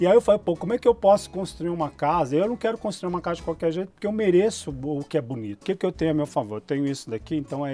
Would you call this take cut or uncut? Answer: cut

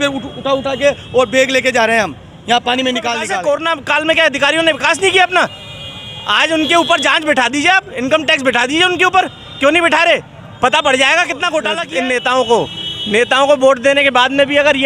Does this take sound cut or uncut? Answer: cut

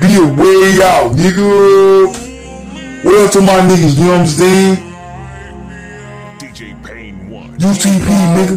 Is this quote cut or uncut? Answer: uncut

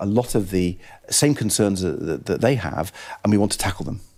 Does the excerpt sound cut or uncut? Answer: uncut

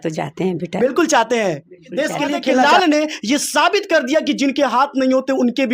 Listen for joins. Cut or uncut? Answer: cut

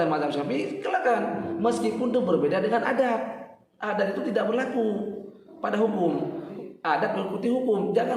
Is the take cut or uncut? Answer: cut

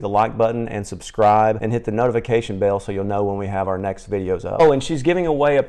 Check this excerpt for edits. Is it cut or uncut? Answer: cut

